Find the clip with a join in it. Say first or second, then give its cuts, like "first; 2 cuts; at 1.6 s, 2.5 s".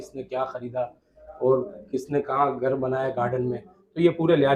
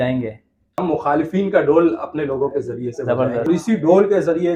second; 2 cuts; at 0.8 s, 3.5 s